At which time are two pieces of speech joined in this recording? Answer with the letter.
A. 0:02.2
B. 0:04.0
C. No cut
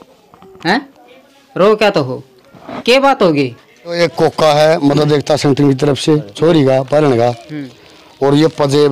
B